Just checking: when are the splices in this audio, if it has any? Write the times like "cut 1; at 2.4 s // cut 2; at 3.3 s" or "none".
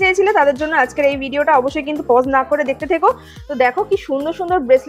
none

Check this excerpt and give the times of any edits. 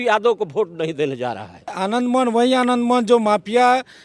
cut 1; at 1.7 s

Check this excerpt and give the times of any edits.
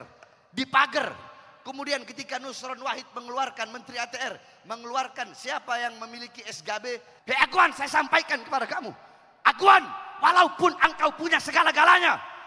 cut 1; at 7.1 s

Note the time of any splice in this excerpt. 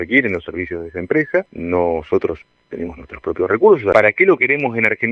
cut 1; at 1.5 s // cut 2; at 3.9 s

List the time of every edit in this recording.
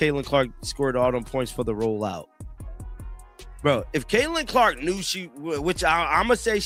none

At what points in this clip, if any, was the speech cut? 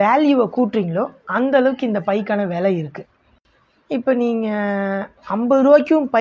none

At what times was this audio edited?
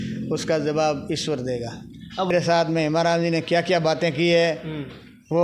cut 1; at 2.3 s

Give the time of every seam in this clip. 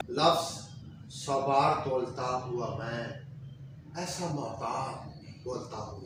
none

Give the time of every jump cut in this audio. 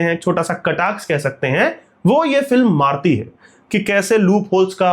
none

